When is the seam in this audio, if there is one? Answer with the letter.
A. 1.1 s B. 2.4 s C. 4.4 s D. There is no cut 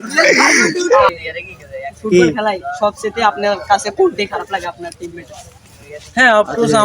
A